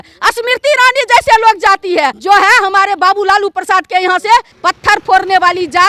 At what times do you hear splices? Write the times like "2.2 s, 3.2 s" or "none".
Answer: 2.2 s, 4.5 s